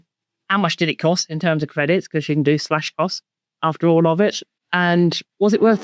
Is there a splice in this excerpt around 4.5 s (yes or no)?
yes